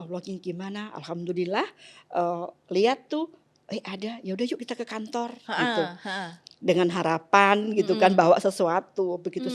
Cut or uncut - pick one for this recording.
uncut